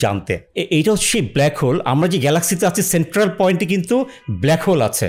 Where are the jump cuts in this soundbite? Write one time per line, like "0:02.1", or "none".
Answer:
none